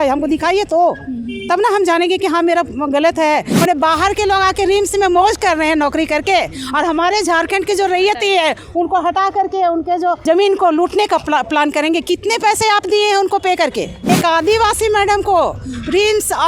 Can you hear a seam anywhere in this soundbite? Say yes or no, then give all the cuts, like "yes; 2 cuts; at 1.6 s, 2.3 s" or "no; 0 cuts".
yes; 3 cuts; at 3.5 s, 10.2 s, 14.0 s